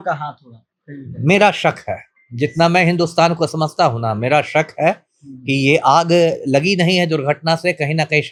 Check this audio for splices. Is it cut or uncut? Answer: uncut